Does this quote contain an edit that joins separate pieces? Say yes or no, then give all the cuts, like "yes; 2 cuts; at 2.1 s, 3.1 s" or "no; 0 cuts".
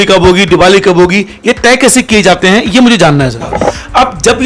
yes; 1 cut; at 3.5 s